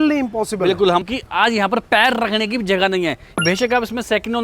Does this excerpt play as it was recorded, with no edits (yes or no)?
no